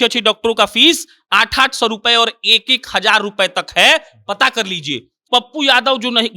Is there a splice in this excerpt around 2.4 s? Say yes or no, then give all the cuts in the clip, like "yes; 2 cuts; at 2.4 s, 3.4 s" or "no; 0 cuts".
no; 1 cut; at 5.2 s